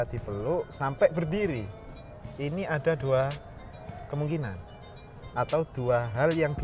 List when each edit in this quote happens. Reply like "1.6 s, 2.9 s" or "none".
none